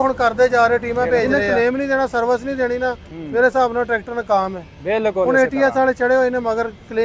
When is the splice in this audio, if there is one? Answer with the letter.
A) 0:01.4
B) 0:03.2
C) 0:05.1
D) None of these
A